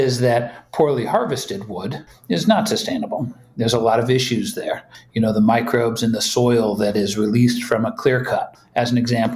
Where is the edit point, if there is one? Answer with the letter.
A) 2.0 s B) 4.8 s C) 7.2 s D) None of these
D